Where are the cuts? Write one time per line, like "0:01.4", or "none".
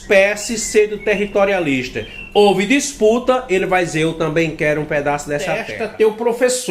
0:05.8